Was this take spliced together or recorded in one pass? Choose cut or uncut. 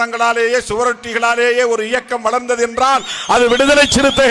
uncut